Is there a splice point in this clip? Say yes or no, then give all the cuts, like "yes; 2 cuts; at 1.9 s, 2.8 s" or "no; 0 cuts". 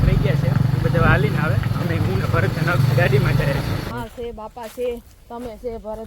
yes; 1 cut; at 3.9 s